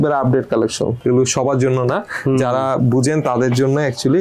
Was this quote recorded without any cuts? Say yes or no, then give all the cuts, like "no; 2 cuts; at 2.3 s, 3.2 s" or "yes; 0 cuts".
yes; 0 cuts